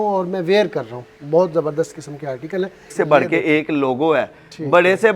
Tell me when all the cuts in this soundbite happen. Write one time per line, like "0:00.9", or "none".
0:03.0